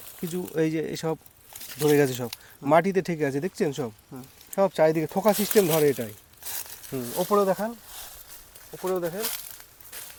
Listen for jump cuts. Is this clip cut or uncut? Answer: uncut